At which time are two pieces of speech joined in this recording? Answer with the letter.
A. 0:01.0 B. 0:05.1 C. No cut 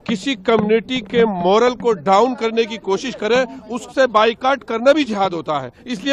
C